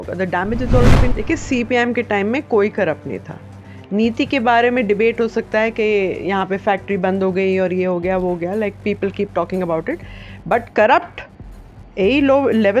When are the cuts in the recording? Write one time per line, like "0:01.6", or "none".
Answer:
0:01.1